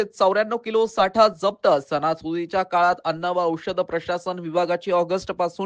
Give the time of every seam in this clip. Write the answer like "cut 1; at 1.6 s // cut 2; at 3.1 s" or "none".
none